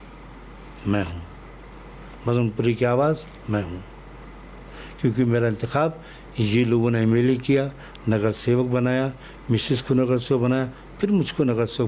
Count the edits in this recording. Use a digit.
0